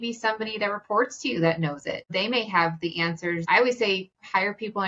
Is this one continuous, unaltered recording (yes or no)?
no